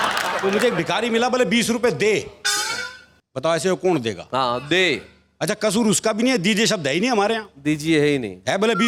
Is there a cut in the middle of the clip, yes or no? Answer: no